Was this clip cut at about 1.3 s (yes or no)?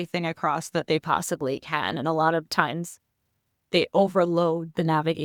no